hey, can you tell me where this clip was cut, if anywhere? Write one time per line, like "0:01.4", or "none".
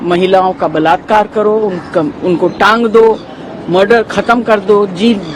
none

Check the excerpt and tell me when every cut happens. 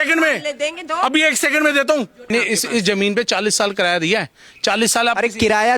0:02.2

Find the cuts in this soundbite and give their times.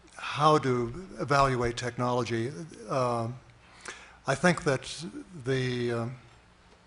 none

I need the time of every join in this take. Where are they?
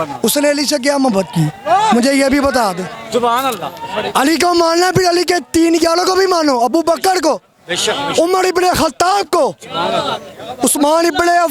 none

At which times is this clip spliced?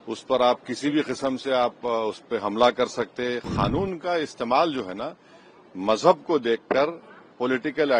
0:03.5

